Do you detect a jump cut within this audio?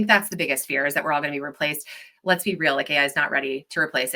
no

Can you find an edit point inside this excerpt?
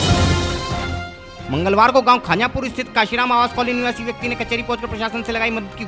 yes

